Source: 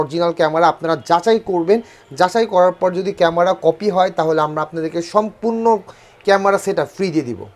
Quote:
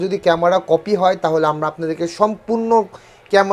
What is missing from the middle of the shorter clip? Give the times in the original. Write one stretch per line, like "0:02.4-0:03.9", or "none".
none